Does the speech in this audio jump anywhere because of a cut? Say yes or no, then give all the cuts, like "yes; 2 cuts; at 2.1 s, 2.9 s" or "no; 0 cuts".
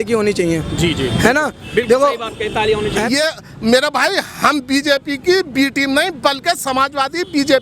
yes; 1 cut; at 3.1 s